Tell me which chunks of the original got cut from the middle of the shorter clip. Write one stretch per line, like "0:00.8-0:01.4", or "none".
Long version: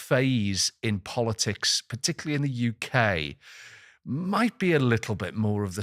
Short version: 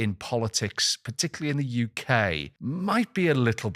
0:03.3-0:03.9